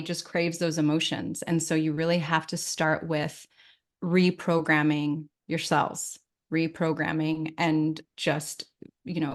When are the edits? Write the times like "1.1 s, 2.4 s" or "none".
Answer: none